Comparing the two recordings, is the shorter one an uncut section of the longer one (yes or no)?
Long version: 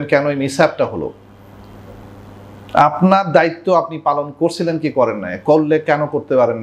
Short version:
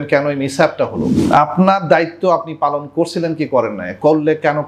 no